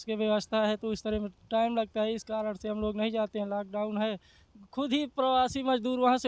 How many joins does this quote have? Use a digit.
0